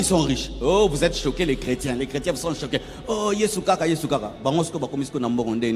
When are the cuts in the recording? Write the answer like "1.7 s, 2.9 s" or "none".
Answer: none